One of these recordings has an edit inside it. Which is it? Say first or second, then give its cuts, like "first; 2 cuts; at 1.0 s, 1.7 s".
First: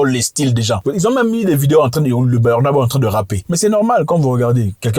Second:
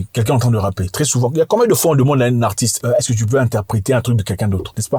first; 1 cut; at 3.4 s